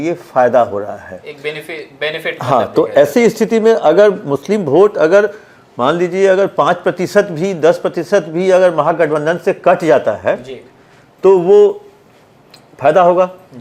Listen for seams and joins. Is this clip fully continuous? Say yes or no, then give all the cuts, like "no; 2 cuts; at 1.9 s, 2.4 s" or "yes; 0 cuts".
yes; 0 cuts